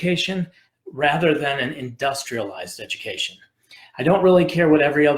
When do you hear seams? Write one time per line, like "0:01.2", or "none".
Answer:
none